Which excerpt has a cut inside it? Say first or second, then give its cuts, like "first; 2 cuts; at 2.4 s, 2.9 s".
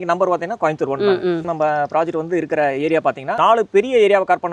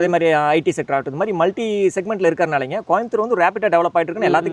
first; 2 cuts; at 1.5 s, 3.4 s